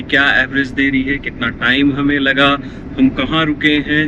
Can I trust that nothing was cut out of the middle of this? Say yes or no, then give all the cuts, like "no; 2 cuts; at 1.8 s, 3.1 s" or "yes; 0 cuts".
yes; 0 cuts